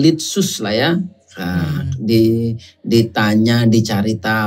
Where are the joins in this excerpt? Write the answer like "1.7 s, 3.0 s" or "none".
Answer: none